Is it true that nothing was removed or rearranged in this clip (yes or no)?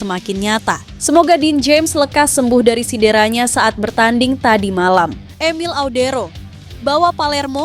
no